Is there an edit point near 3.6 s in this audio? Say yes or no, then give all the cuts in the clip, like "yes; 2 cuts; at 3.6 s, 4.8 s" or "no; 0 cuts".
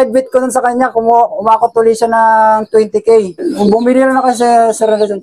yes; 1 cut; at 3.6 s